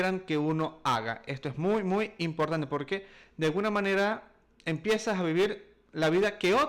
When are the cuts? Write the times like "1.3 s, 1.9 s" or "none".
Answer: none